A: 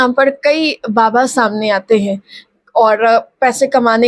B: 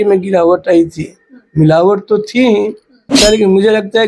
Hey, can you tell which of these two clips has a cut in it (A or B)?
B